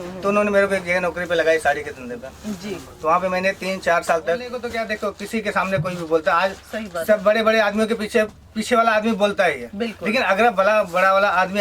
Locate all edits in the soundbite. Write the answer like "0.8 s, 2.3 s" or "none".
4.7 s